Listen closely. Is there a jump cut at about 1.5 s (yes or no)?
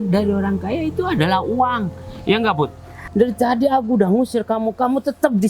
no